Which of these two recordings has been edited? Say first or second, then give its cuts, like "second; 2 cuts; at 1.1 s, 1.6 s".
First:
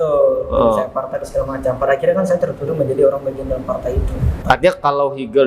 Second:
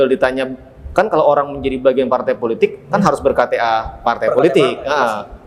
first; 1 cut; at 4.3 s